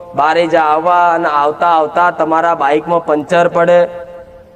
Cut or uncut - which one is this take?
uncut